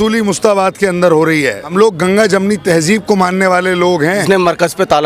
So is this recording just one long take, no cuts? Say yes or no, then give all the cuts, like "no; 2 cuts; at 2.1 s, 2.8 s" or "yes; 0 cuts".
no; 2 cuts; at 1.6 s, 4.2 s